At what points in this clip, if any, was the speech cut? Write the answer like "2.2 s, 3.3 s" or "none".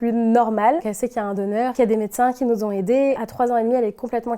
1.7 s, 3.2 s